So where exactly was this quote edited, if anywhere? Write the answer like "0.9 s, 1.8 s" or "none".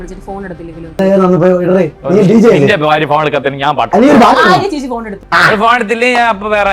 1.0 s, 5.2 s